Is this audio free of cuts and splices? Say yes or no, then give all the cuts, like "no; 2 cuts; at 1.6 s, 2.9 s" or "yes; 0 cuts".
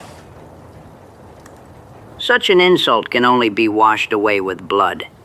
yes; 0 cuts